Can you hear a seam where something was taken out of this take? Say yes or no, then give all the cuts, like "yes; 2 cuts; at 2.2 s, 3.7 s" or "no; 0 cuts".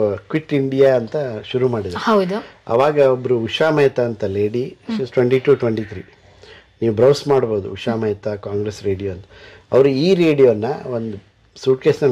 no; 0 cuts